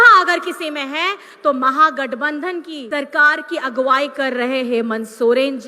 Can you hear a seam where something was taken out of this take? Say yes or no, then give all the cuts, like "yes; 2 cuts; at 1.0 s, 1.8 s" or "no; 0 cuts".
yes; 1 cut; at 2.8 s